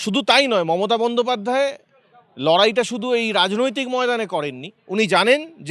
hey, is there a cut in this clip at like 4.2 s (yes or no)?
no